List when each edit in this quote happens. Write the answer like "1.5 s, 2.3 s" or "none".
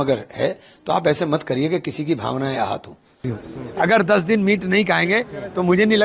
3.3 s